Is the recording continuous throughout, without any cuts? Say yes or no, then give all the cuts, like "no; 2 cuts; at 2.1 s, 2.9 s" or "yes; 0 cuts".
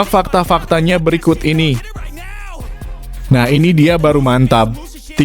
no; 2 cuts; at 2.0 s, 3.3 s